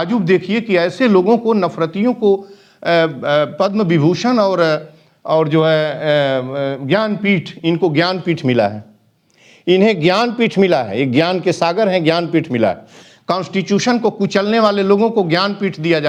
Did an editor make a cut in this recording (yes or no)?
no